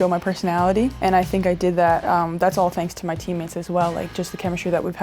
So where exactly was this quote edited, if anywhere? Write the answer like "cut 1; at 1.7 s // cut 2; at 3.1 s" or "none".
cut 1; at 0.9 s